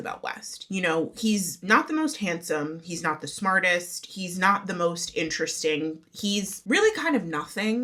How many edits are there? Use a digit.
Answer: 0